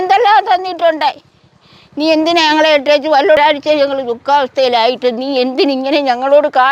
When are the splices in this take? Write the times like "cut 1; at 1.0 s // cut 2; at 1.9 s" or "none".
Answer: none